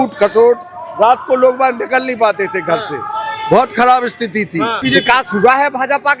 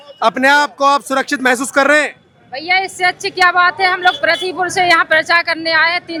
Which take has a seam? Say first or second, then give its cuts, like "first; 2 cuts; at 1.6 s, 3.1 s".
first; 1 cut; at 4.8 s